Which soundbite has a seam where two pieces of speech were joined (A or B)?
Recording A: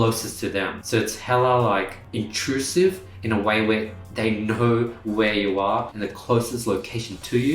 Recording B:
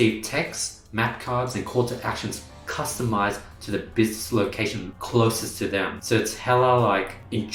A